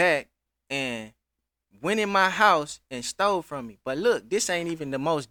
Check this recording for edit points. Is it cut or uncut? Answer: uncut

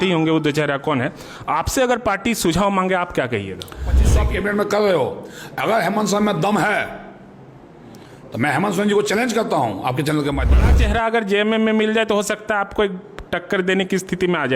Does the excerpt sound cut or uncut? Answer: cut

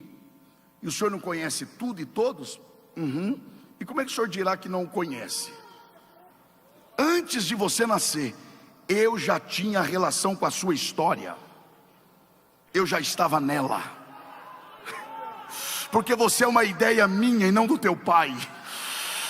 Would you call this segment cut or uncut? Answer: cut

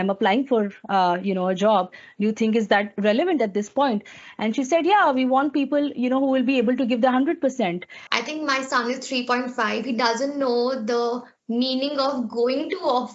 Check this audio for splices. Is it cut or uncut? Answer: cut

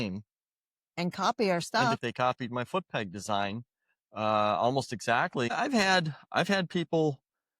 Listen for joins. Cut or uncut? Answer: cut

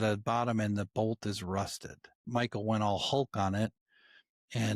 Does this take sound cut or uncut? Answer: cut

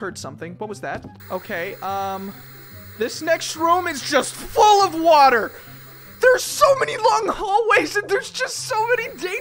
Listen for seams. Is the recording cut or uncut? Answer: uncut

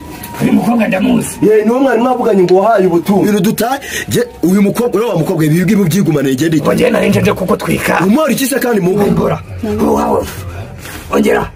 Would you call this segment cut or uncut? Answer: cut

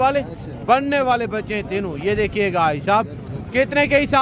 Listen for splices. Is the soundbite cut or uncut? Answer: uncut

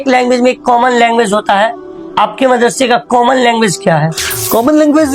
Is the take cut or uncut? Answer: uncut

